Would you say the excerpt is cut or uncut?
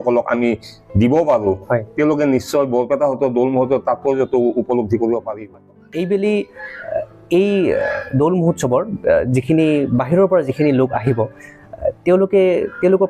cut